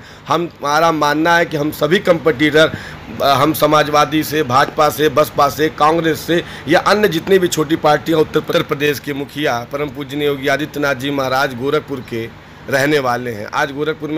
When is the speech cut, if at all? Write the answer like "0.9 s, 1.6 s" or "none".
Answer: 8.5 s

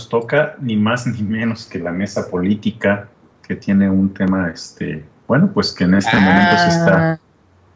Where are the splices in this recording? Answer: 2.2 s

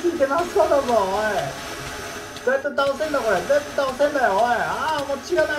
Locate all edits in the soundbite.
none

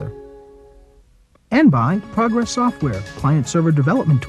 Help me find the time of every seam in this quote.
1.5 s

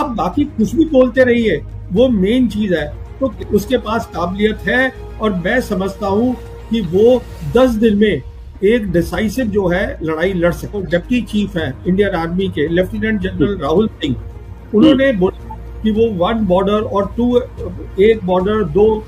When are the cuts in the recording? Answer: 3.3 s, 10.8 s

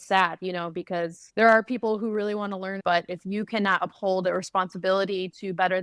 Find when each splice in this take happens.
1.2 s, 2.8 s

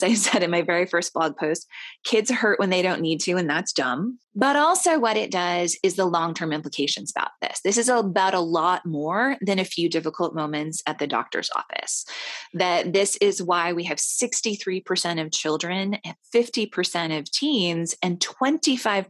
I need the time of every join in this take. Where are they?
4.2 s

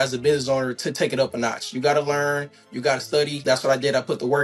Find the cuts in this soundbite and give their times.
3.4 s

